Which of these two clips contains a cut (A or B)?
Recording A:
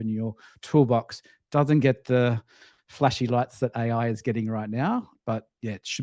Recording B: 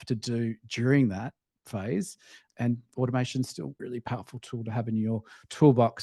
B